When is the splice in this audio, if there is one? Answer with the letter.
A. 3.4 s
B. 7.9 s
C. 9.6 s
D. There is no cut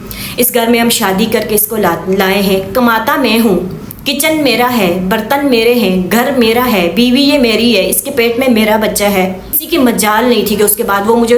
C